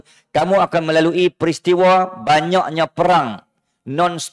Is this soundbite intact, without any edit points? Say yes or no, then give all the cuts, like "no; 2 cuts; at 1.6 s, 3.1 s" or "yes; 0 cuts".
yes; 0 cuts